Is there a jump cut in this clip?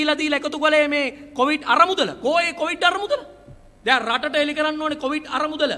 no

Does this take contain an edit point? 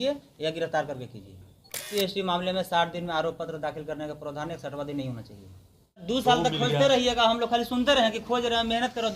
yes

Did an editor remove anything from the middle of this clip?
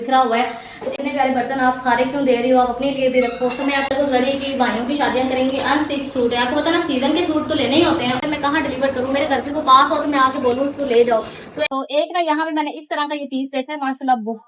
yes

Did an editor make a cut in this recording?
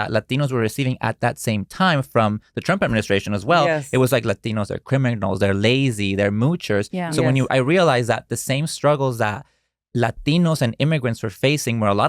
no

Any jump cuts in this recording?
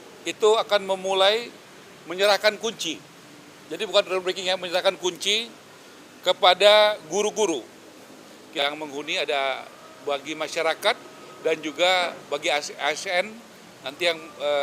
yes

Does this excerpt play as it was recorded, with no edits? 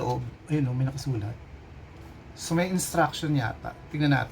yes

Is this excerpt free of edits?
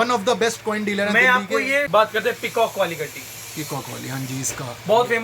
no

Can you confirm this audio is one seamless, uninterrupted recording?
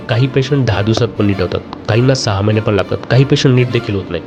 yes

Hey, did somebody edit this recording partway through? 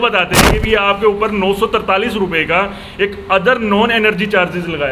no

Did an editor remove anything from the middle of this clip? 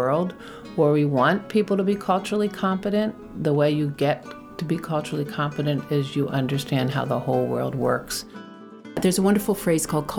yes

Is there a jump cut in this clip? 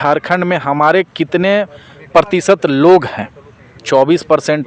no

